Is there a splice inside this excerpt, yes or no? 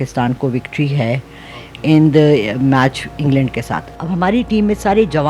yes